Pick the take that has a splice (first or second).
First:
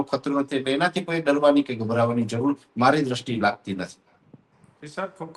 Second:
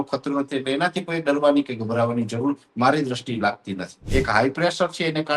second